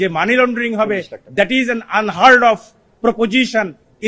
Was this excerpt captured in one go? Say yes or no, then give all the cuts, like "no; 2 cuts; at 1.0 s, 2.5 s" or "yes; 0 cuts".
yes; 0 cuts